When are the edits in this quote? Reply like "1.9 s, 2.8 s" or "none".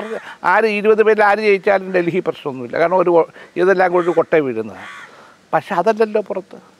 none